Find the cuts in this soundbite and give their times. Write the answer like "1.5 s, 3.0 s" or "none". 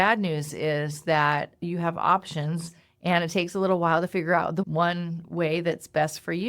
4.7 s

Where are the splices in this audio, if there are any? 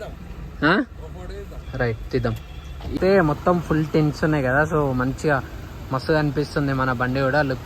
3.0 s

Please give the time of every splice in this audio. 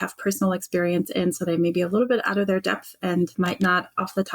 3.3 s

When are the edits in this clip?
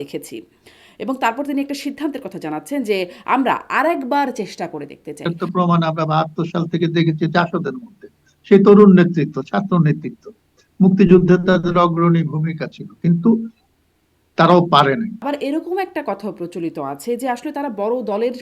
5.2 s, 15.2 s

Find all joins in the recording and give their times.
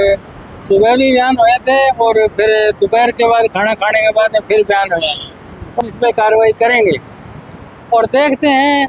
none

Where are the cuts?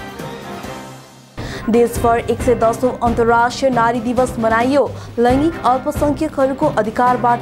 1.1 s

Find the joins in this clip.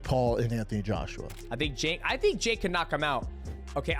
1.4 s

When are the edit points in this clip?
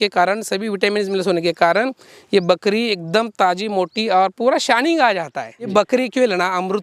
5.7 s

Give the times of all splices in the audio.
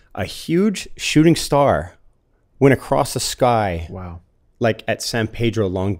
none

